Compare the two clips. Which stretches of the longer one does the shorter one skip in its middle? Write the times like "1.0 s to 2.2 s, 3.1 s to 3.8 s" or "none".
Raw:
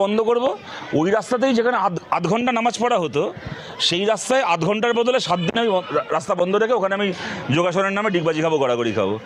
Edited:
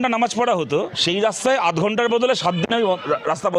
3.4 s to 3.8 s